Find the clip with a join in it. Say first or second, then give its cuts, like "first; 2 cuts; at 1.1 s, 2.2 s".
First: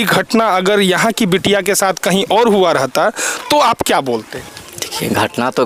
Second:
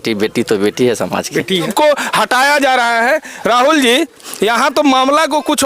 second; 1 cut; at 1.7 s